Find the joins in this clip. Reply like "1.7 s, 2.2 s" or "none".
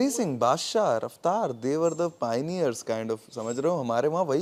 none